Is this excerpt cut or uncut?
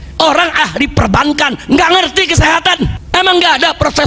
cut